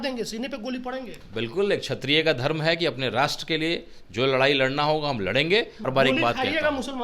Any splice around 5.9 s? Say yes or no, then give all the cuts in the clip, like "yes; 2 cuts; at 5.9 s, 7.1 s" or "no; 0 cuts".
yes; 1 cut; at 5.9 s